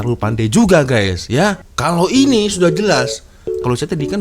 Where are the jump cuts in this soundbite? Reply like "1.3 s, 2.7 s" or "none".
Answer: 1.7 s

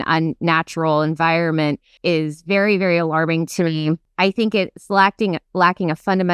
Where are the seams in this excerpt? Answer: 1.9 s, 4.1 s

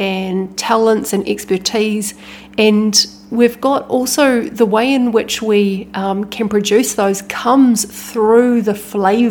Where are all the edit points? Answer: none

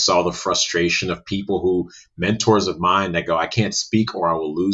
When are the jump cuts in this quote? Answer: none

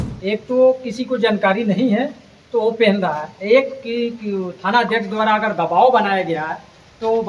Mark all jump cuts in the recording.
none

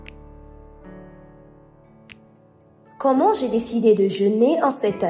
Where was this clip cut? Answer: 1.7 s

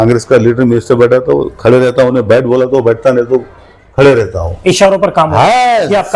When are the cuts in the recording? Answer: none

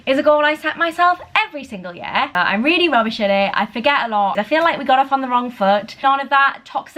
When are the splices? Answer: 2.3 s, 4.3 s, 6.0 s

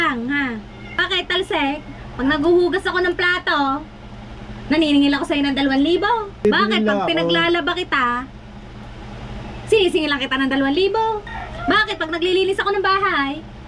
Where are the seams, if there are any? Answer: 1.0 s, 6.3 s, 11.2 s

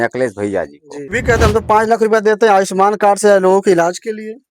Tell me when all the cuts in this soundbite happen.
1.2 s

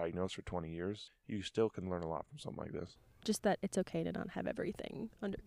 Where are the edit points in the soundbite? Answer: 1.1 s, 3.0 s

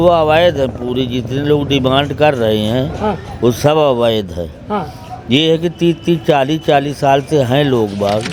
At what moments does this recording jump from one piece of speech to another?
none

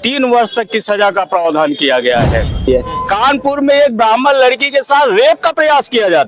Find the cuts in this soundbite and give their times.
2.7 s

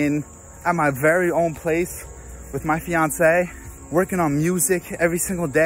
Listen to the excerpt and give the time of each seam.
3.7 s

